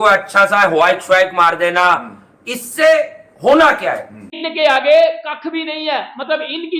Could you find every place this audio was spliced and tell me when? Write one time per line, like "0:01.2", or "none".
0:04.1